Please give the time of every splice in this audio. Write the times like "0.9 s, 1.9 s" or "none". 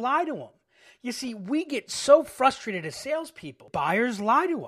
3.7 s